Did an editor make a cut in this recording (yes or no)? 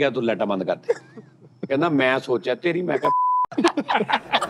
no